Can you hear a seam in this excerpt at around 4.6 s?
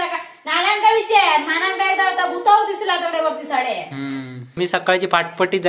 yes; 1 cut; at 4.6 s

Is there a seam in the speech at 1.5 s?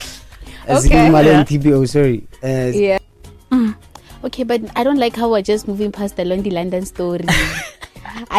no; 1 cut; at 3.0 s

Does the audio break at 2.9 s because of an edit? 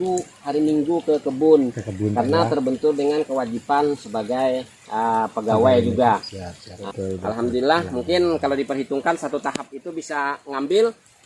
no; 1 cut; at 6.8 s

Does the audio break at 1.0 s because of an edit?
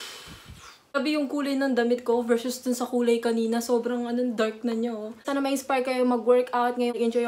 yes; 2 cuts; at 1.0 s, 5.3 s

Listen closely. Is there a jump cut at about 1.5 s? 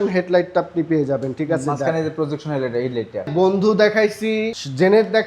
no; 1 cut; at 3.2 s

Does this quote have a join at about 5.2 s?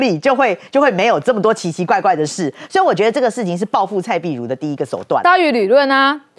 yes; 1 cut; at 5.2 s

